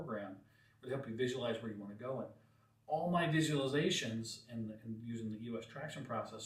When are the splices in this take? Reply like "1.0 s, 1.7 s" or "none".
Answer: none